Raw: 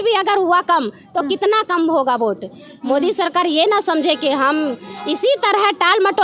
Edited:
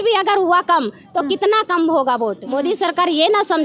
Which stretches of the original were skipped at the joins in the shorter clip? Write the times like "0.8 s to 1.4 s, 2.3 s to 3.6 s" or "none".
2.4 s to 2.8 s